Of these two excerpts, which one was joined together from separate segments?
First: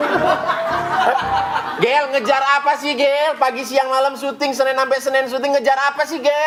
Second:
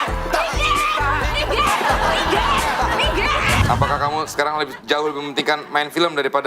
second; 1 cut; at 3.6 s

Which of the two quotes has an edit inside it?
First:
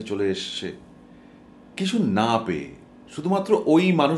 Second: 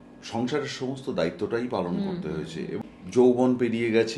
second; 1 cut; at 2.7 s

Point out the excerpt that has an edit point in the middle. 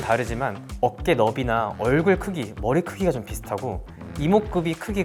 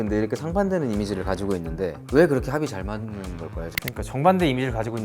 second; 2 cuts; at 2.0 s, 3.7 s

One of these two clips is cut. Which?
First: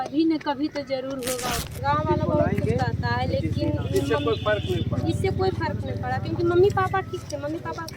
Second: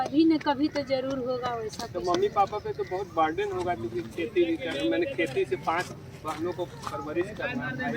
first; 1 cut; at 1.7 s

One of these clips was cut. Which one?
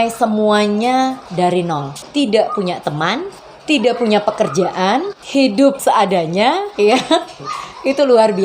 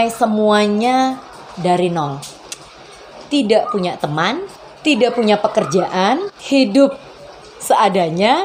first; 4 cuts; at 1.2 s, 2.0 s, 5.8 s, 6.7 s

